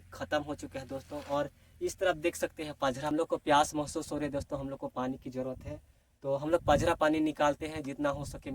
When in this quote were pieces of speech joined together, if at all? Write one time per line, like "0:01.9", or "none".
0:03.1